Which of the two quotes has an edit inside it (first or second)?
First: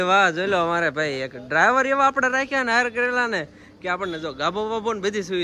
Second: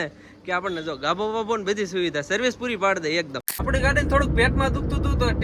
second